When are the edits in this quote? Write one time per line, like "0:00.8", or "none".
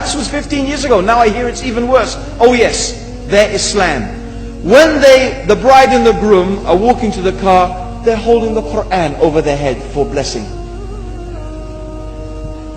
0:03.3